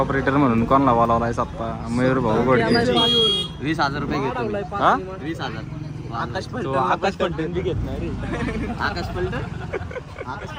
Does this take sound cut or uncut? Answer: uncut